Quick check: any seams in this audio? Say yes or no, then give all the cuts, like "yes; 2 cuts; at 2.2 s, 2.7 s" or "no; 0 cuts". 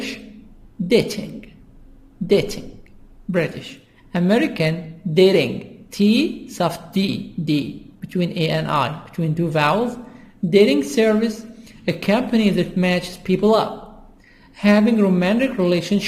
yes; 1 cut; at 4.6 s